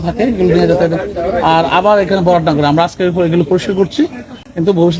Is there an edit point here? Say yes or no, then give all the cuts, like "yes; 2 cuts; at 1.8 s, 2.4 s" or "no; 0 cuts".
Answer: no; 0 cuts